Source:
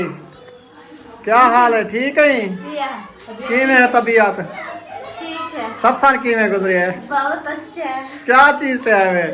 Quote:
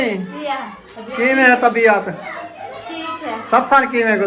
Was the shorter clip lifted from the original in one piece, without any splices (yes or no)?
yes